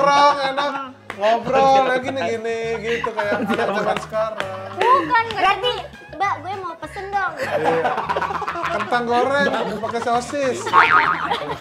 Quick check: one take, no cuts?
yes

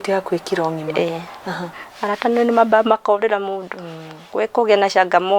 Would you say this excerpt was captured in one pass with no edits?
no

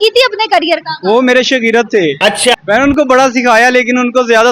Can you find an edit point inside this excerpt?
yes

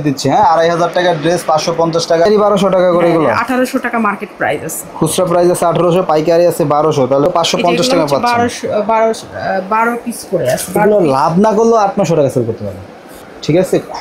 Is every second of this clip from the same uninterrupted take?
no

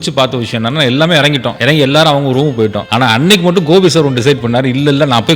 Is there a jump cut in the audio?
yes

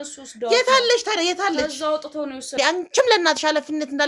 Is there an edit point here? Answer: yes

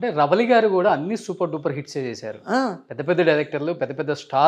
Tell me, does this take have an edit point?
no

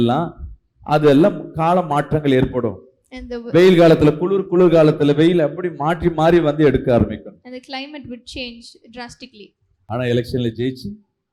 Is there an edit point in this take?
no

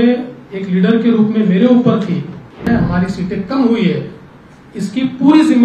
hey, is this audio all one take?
no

